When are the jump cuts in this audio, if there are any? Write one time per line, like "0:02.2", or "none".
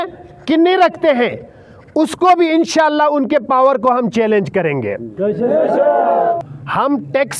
0:06.4